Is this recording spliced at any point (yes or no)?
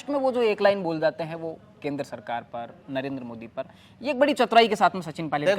no